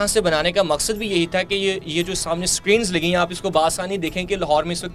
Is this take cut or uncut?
uncut